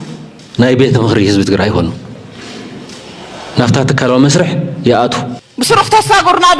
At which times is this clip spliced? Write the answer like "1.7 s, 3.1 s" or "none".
5.5 s

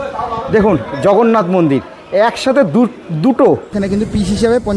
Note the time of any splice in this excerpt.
3.8 s

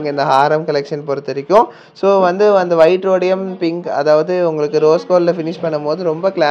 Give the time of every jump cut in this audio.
none

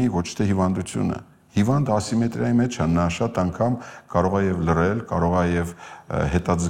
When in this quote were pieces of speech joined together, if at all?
none

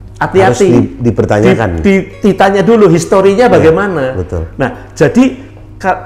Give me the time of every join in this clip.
none

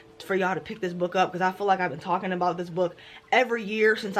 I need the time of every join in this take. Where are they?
none

